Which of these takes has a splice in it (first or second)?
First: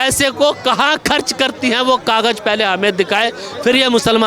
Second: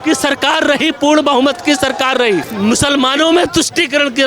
second